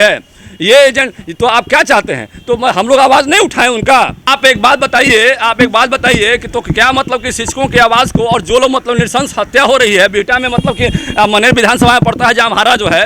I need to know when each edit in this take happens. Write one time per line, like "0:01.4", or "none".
0:04.3

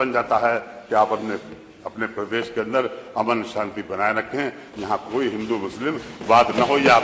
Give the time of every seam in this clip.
none

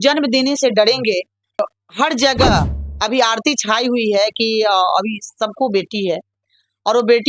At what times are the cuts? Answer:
0:01.6

